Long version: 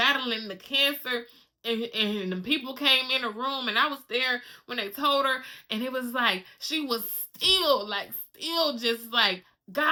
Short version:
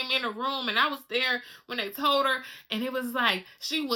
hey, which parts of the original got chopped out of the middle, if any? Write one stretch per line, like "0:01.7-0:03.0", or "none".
none